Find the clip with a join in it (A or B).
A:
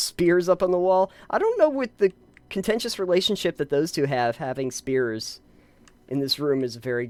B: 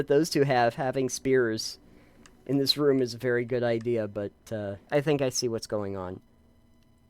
B